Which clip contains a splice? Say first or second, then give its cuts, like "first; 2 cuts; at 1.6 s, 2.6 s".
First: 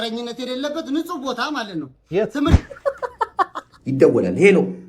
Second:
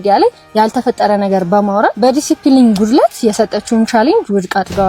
first; 1 cut; at 2.6 s